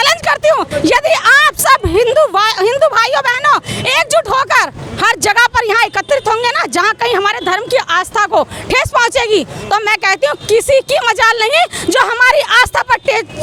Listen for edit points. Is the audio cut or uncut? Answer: uncut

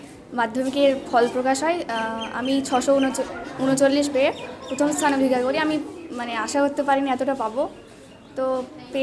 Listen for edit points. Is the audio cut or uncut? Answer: uncut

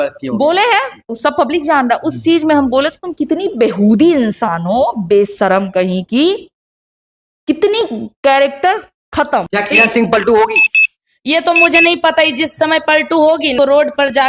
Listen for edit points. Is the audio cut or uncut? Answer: cut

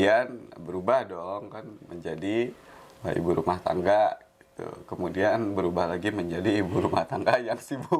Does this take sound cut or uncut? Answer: uncut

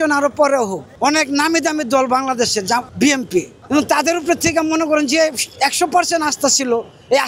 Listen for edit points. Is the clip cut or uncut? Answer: cut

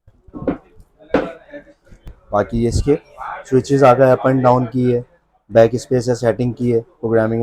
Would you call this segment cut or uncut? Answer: cut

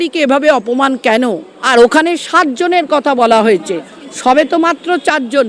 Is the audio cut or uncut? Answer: cut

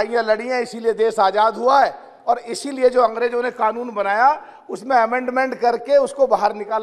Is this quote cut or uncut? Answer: uncut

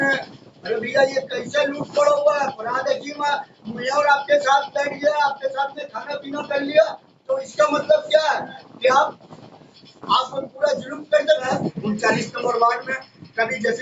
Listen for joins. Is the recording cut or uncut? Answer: cut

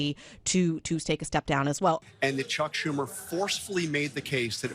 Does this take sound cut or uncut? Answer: cut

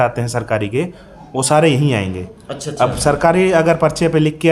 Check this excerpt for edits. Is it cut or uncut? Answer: uncut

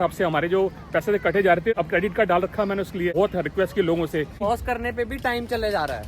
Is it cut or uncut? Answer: cut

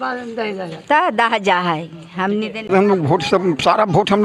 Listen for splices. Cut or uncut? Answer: cut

